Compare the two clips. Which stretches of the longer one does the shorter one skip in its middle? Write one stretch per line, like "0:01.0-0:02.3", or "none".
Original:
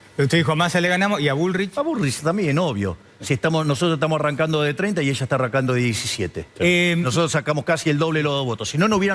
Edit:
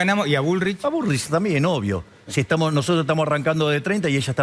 none